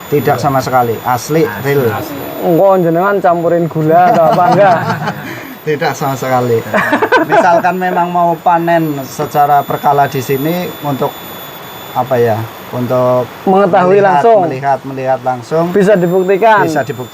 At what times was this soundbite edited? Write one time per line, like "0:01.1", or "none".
none